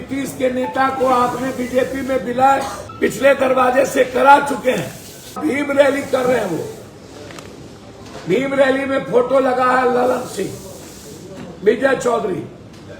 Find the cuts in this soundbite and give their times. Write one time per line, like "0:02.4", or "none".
0:02.8
0:05.4